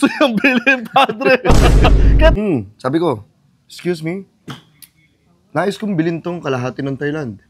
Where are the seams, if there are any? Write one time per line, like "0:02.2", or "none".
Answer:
0:02.4